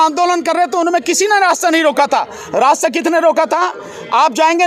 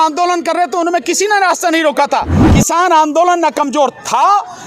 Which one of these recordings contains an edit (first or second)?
second